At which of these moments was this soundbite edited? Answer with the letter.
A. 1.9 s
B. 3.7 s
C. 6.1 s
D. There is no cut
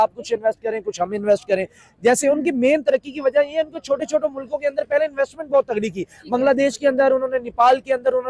D